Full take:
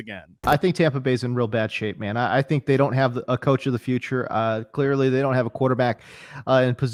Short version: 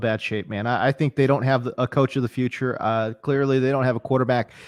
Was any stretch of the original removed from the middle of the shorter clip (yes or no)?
no